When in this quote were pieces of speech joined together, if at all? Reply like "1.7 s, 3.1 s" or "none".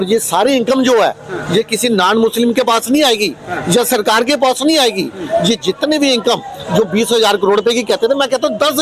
none